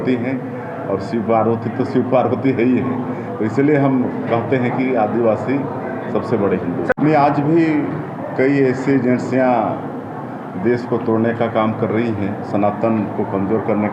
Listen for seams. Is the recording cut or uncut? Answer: uncut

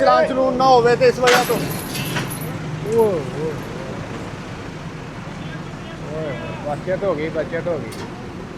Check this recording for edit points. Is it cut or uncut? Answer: uncut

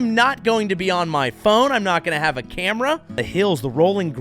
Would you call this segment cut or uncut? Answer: cut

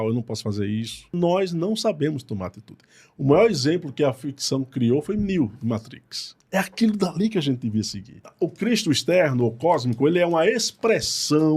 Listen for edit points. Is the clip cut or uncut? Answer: cut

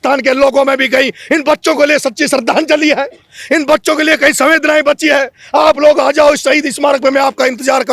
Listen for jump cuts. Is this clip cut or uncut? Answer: uncut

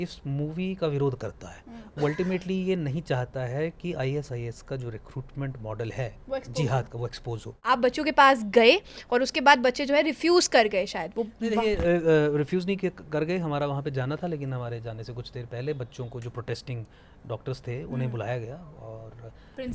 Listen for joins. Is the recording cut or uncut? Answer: cut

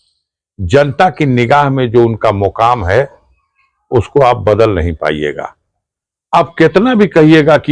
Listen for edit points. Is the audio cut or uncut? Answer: uncut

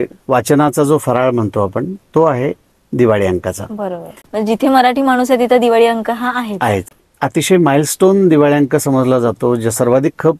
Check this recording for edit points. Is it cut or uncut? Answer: cut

